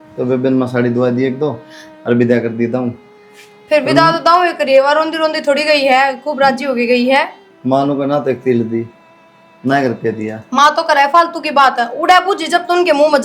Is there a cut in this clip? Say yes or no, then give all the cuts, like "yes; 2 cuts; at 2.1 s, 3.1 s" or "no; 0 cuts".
no; 0 cuts